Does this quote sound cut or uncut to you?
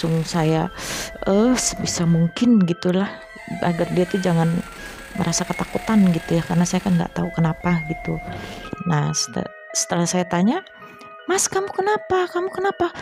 uncut